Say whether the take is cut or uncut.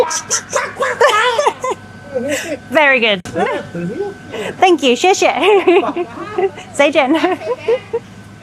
uncut